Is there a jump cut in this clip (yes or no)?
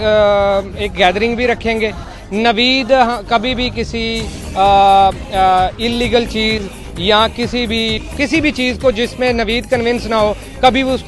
yes